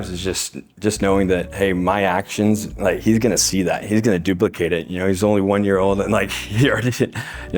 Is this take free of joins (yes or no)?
yes